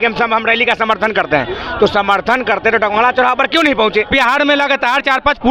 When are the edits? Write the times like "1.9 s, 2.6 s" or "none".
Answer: 4.1 s